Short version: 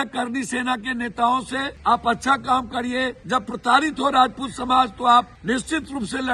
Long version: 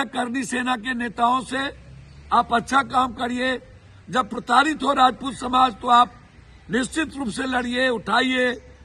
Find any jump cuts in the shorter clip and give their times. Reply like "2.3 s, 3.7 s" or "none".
1.7 s, 3.2 s, 5.4 s

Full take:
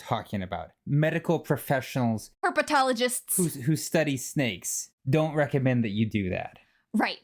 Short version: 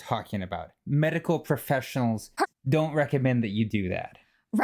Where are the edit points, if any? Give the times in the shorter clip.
2.3 s

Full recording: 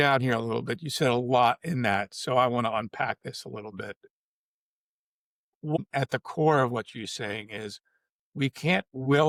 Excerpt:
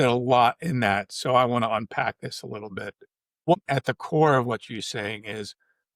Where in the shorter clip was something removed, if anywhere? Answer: 3.5 s

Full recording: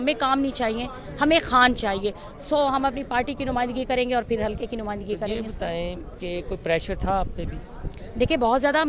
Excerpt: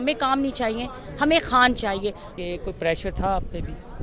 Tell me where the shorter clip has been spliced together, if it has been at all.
2.3 s

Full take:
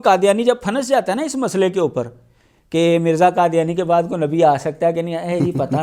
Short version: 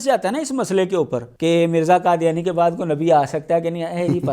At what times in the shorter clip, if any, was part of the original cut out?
1.2 s

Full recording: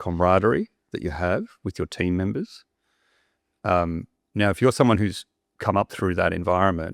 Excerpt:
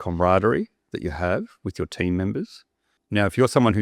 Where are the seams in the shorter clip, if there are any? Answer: 2.9 s

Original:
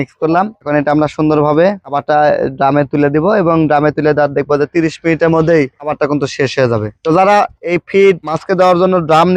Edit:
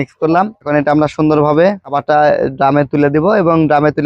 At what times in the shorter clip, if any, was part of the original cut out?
none

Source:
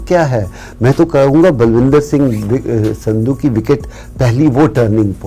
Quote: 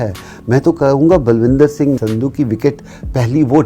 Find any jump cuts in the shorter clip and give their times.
2.0 s

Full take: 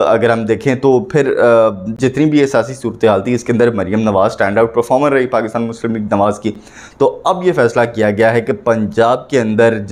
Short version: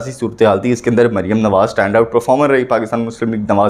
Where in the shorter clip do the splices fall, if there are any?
none

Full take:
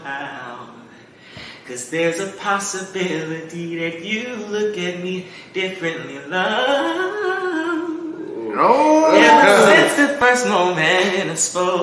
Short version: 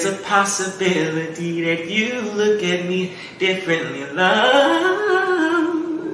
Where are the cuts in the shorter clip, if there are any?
none

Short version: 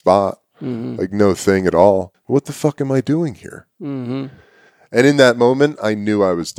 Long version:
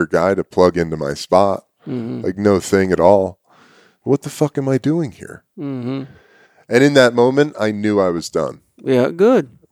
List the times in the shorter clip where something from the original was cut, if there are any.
2.2 s

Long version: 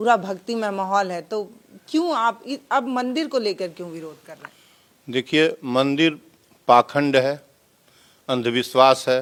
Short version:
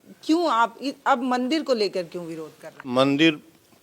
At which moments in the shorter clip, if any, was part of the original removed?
2.8 s

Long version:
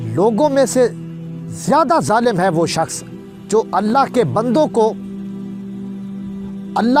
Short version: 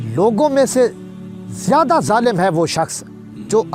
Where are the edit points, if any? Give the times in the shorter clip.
none

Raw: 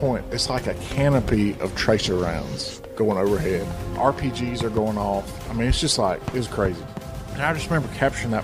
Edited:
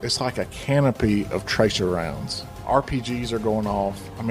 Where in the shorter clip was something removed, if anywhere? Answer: 2.5 s

